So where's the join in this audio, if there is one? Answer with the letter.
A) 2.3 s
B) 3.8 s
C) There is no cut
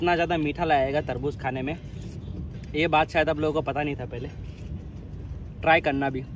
C